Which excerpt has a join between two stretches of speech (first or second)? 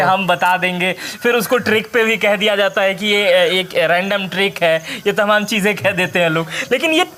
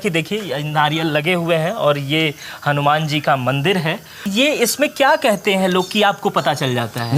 second